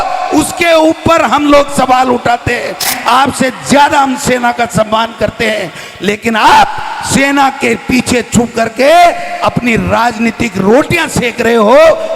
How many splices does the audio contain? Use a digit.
1